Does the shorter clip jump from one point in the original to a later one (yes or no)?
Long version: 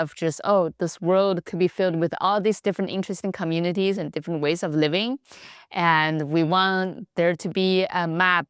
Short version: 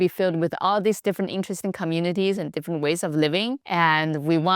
yes